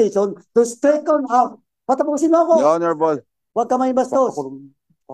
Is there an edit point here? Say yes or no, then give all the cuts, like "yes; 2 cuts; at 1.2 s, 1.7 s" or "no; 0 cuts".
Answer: no; 0 cuts